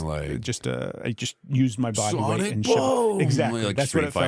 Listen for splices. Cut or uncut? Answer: uncut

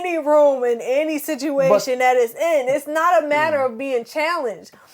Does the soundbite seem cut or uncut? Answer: uncut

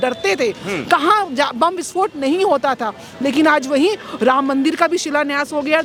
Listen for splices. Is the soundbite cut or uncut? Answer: uncut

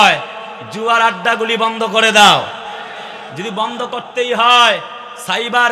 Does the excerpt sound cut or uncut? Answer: uncut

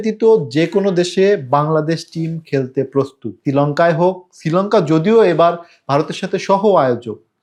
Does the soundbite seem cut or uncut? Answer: uncut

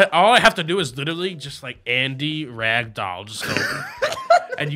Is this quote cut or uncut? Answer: uncut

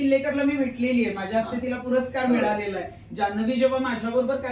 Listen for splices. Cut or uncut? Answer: uncut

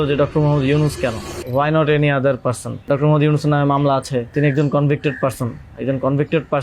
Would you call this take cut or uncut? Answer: cut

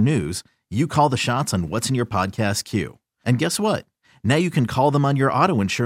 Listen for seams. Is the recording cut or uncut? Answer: uncut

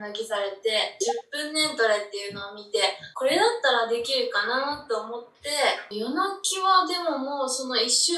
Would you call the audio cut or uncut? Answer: cut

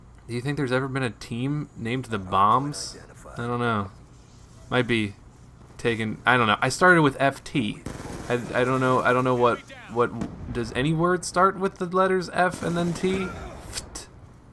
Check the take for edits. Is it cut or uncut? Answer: cut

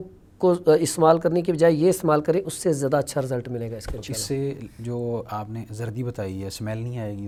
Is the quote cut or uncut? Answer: uncut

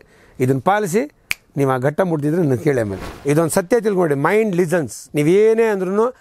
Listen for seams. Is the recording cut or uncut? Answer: cut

